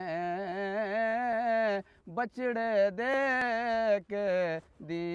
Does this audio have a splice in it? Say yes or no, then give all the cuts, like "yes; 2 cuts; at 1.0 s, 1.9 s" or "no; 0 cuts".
no; 0 cuts